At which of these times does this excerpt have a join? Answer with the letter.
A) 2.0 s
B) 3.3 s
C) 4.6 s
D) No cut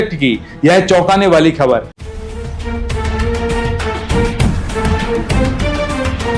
A